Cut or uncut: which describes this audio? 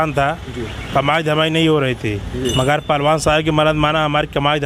uncut